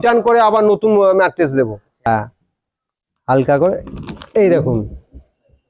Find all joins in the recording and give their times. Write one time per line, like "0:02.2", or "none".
0:02.1